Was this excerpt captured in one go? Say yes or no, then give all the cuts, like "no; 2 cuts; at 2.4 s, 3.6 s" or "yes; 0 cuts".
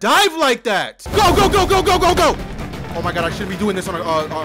no; 1 cut; at 1.0 s